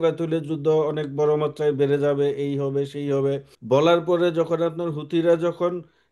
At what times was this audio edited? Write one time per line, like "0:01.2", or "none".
0:03.5